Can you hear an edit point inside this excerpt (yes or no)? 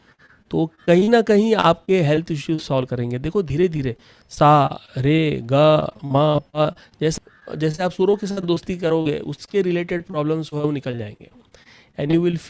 yes